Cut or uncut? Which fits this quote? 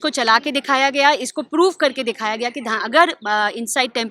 uncut